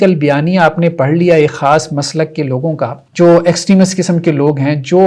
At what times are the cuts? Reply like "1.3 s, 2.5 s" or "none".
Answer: 3.0 s